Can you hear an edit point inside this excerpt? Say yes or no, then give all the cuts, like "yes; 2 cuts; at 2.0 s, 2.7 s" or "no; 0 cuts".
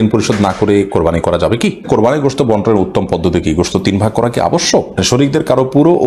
yes; 2 cuts; at 1.9 s, 5.0 s